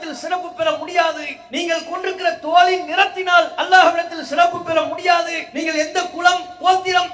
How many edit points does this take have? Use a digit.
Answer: 2